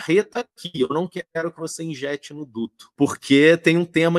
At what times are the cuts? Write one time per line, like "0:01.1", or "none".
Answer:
0:02.8